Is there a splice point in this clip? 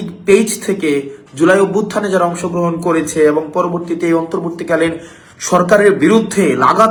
no; 0 cuts

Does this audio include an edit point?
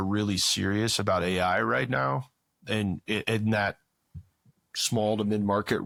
no; 0 cuts

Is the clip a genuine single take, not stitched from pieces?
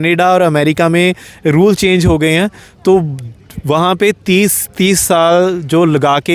yes; 0 cuts

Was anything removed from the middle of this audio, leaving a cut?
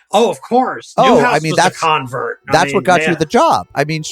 yes; 1 cut; at 1.0 s

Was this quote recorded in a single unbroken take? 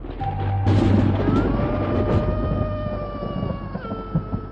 no; 1 cut; at 1.2 s

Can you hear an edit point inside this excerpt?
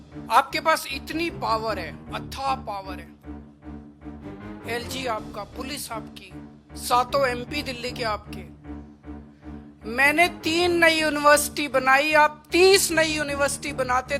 yes; 2 cuts; at 8.2 s, 9.8 s

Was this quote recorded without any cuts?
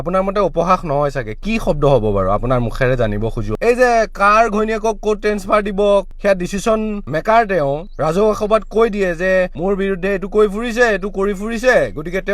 no; 1 cut; at 6.1 s

